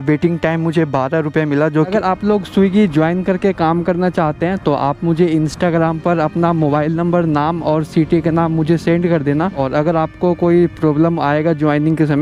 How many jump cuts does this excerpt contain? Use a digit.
2